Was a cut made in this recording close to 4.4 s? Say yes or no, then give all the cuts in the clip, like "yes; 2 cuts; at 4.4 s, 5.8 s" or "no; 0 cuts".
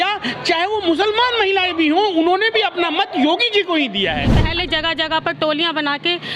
yes; 1 cut; at 4.4 s